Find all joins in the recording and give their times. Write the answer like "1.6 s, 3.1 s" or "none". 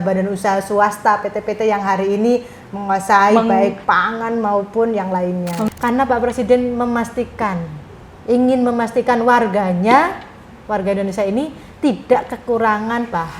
5.6 s